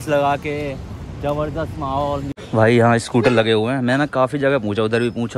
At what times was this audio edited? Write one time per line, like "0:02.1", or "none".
0:02.3